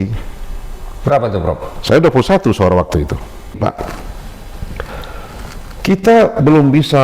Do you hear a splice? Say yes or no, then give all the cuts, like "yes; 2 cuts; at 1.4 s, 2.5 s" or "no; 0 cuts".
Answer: yes; 1 cut; at 3.6 s